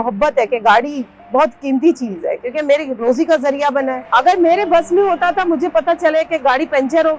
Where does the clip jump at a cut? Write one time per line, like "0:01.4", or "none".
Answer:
0:04.0